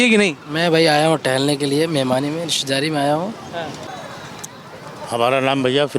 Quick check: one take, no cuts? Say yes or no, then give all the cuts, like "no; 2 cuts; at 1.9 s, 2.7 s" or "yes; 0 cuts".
no; 1 cut; at 3.9 s